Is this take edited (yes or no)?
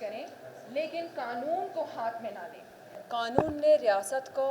yes